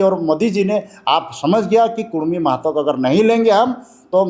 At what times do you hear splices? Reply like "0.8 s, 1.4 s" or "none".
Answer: none